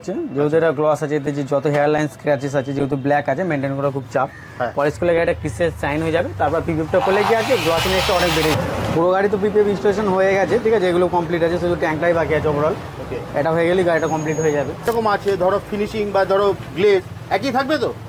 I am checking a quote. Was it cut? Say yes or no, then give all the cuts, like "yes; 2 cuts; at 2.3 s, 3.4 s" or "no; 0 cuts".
yes; 2 cuts; at 8.5 s, 14.9 s